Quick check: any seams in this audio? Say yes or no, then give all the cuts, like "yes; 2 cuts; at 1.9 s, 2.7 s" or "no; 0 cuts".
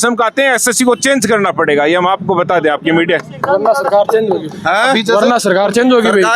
no; 0 cuts